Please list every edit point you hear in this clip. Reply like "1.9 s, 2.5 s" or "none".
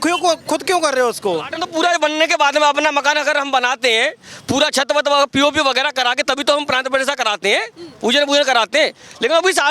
1.6 s

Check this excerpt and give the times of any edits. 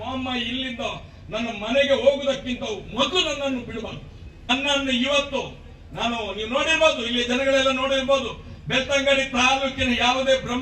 4.5 s

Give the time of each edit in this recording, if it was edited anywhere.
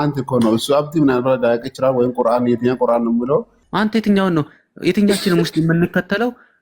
3.6 s

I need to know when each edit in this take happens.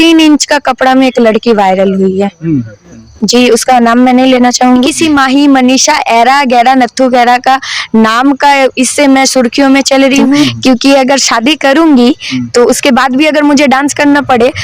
4.9 s, 10.5 s

